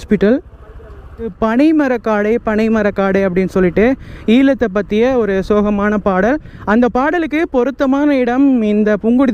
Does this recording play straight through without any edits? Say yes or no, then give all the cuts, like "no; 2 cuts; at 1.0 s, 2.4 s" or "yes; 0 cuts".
no; 1 cut; at 1.3 s